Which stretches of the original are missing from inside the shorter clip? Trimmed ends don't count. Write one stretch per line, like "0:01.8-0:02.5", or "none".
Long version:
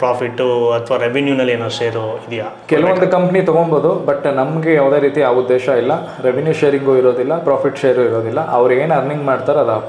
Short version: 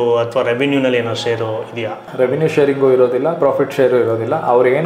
0:02.6-0:06.1